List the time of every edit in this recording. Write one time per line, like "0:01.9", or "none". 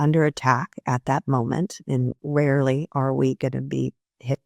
0:02.2